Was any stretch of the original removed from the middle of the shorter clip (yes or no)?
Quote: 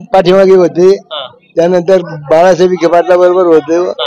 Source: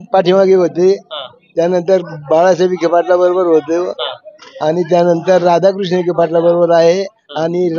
no